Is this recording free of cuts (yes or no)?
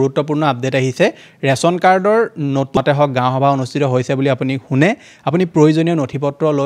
no